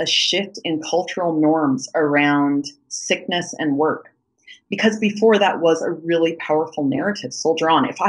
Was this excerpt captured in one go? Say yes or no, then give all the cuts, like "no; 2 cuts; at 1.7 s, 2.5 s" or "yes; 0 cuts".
yes; 0 cuts